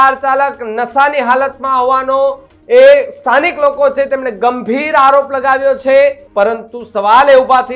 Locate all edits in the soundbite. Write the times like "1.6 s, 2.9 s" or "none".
6.2 s